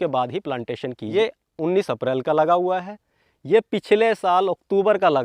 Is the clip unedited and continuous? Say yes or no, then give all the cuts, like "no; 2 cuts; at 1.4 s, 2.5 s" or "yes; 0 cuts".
no; 1 cut; at 1.0 s